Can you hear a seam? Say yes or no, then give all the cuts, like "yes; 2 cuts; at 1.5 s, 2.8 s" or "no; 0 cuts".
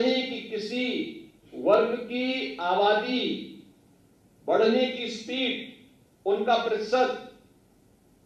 no; 0 cuts